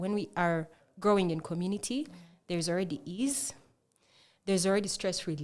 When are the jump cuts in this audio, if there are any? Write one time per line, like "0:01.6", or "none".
none